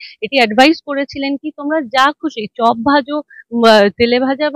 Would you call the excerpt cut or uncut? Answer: uncut